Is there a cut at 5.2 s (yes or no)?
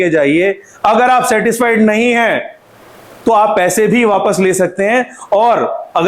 no